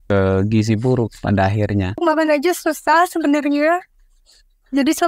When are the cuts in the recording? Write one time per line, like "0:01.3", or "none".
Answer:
0:02.0